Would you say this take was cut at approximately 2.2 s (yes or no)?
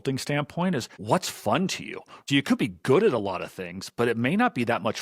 yes